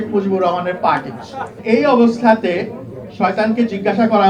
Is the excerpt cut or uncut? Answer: cut